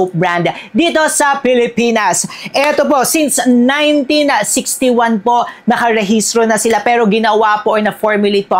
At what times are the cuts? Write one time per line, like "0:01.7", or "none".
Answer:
none